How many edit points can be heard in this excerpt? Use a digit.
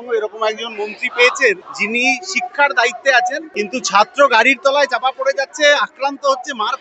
2